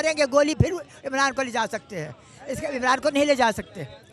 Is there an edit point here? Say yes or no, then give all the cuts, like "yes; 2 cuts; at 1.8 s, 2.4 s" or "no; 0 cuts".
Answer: no; 0 cuts